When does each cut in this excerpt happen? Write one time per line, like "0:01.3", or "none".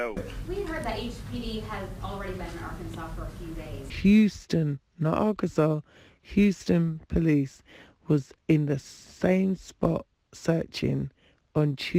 none